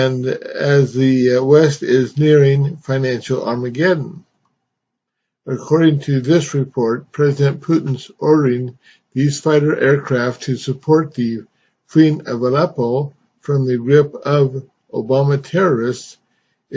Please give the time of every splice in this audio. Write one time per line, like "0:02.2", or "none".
0:01.1